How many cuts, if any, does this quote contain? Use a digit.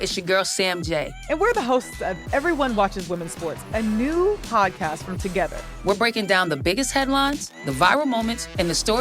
1